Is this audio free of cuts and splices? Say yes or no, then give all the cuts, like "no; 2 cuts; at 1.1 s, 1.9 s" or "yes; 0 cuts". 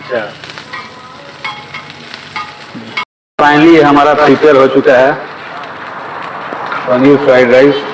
no; 1 cut; at 3.0 s